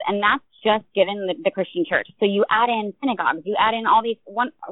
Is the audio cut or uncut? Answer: uncut